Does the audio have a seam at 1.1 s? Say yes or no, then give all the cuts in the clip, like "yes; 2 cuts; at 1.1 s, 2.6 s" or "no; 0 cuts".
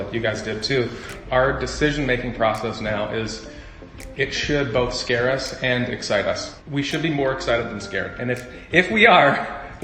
yes; 2 cuts; at 1.1 s, 6.5 s